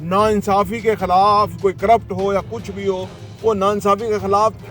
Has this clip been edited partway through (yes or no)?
no